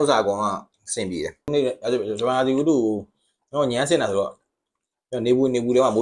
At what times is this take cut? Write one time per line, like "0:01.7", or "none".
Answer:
0:01.5